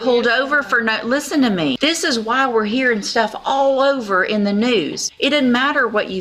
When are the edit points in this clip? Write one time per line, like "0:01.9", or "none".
0:01.8
0:05.0